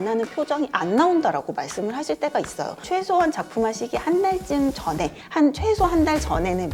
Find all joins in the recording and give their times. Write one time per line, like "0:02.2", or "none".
0:02.8